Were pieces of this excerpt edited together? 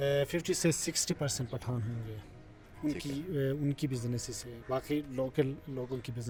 no; 0 cuts

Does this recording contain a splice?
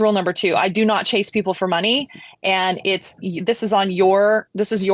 no; 0 cuts

